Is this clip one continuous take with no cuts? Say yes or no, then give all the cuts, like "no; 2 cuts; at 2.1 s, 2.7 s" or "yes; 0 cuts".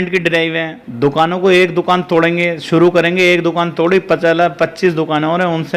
yes; 0 cuts